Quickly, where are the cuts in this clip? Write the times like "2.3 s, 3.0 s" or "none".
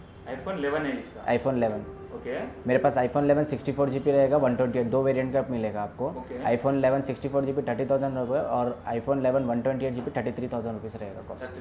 none